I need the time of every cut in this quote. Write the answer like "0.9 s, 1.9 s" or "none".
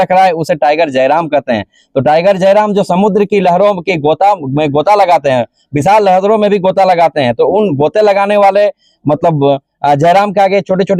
none